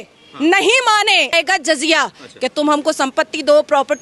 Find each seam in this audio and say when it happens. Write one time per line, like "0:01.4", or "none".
0:01.3